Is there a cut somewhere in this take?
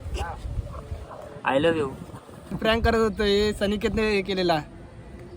yes; 1 cut; at 2.6 s

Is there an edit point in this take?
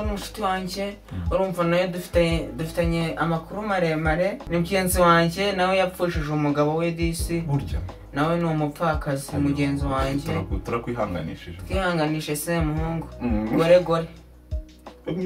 yes; 1 cut; at 4.4 s

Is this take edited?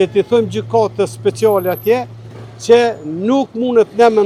no; 0 cuts

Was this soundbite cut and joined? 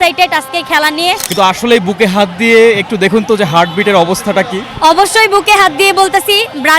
yes; 1 cut; at 1.2 s

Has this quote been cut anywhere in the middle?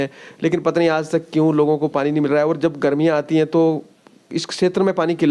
no; 0 cuts

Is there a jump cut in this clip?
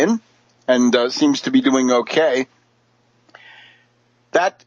yes; 1 cut; at 1.8 s

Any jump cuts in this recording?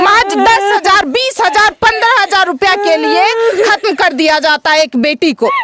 no; 0 cuts

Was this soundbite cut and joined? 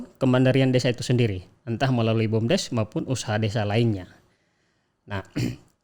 no; 0 cuts

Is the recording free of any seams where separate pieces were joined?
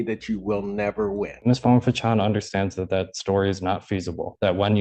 no; 1 cut; at 1.3 s

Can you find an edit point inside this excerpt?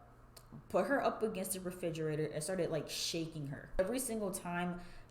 yes; 1 cut; at 3.8 s

